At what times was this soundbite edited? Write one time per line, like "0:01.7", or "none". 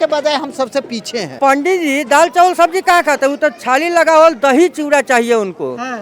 0:01.4